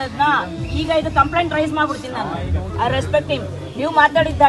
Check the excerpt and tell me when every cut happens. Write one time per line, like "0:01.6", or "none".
0:02.7